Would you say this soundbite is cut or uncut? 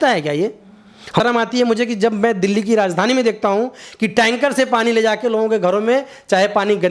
cut